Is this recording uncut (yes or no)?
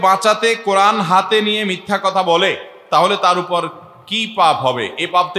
yes